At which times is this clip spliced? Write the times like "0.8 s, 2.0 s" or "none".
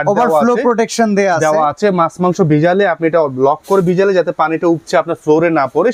none